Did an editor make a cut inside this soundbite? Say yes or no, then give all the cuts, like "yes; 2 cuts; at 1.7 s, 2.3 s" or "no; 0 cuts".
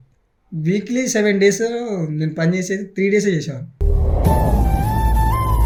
no; 0 cuts